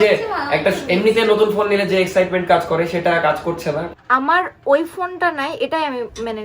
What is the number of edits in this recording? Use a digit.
1